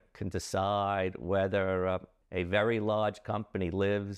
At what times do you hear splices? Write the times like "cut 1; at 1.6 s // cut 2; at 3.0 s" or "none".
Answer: cut 1; at 2.2 s